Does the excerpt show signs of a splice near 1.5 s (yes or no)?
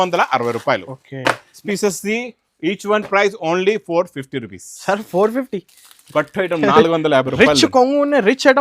yes